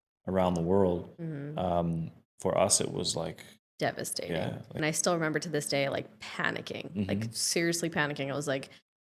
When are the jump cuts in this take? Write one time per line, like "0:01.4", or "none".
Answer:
0:04.7